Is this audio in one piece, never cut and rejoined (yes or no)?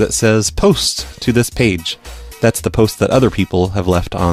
yes